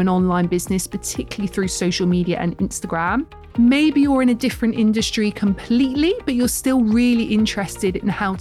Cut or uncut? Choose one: cut